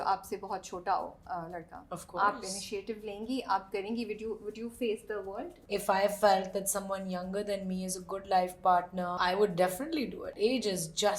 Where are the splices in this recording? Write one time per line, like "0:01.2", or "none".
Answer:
0:05.6
0:09.2
0:10.2